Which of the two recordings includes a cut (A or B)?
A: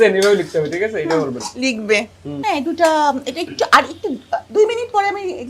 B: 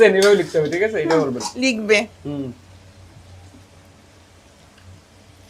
A